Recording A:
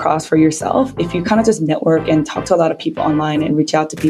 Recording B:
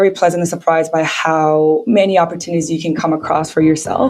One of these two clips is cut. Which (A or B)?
B